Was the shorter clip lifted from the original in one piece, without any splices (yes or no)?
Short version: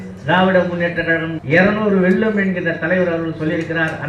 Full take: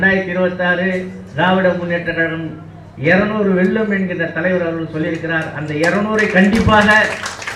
no